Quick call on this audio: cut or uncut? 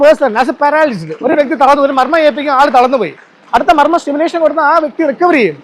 uncut